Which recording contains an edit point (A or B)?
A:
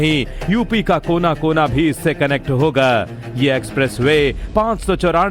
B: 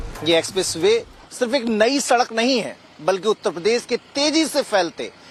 A